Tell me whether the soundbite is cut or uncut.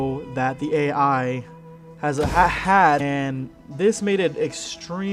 uncut